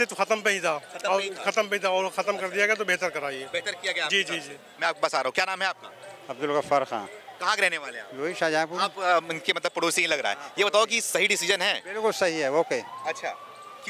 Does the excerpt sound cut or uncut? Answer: uncut